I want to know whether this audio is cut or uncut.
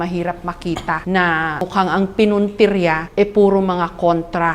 cut